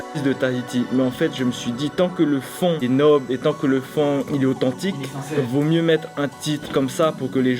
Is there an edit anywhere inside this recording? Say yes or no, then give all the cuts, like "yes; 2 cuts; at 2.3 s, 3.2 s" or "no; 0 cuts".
yes; 1 cut; at 5.4 s